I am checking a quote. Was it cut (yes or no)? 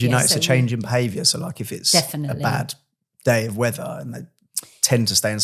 no